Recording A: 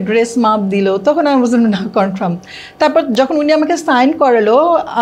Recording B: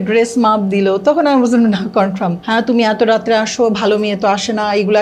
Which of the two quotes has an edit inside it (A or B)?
B